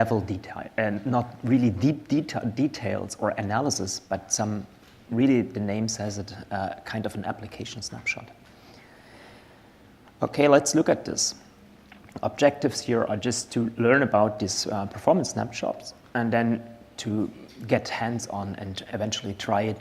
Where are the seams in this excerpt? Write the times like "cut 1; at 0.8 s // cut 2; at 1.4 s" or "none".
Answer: cut 1; at 6.5 s